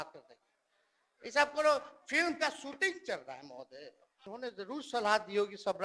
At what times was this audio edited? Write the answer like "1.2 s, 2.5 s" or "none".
4.2 s